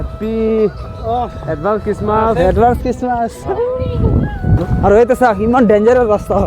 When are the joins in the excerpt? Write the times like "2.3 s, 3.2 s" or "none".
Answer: 4.6 s